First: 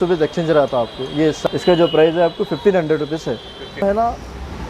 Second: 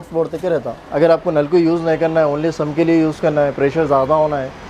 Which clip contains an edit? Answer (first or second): first